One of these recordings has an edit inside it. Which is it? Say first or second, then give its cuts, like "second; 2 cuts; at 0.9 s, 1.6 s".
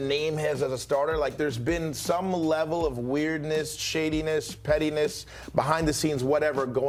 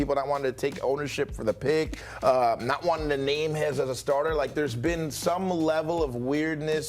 second; 1 cut; at 2.0 s